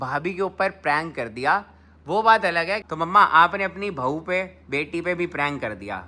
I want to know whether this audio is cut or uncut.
cut